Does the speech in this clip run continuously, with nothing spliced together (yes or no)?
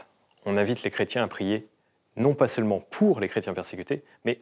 yes